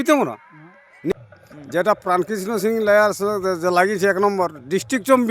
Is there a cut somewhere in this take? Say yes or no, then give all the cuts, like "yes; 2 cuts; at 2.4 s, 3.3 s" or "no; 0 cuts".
yes; 1 cut; at 1.2 s